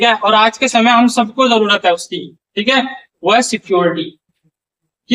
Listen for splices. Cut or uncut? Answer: uncut